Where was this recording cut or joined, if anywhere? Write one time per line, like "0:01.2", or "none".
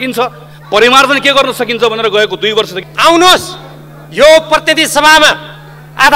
0:02.8